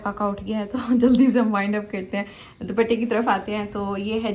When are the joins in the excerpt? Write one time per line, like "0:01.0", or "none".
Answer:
none

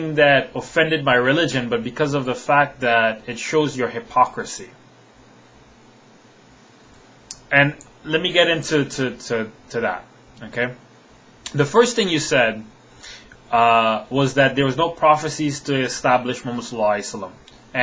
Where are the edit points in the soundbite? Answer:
none

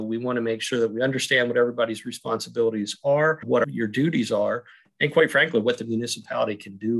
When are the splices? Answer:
0:03.5

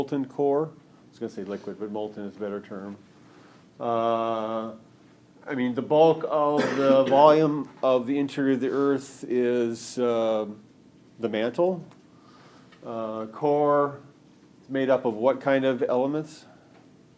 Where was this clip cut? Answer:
0:09.1

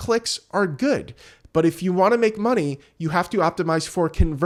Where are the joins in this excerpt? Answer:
none

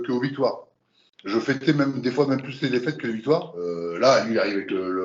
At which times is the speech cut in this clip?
0:03.6

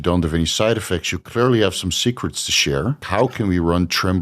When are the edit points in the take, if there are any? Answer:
0:03.0

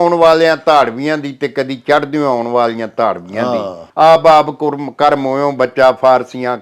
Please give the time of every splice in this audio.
0:03.8

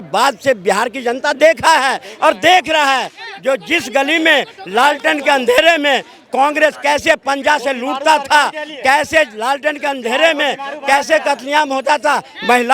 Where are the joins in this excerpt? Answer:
none

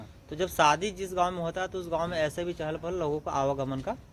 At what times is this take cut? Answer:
none

